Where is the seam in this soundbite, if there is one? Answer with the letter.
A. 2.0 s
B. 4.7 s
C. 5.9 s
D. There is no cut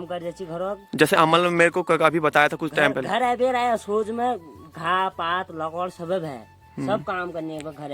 D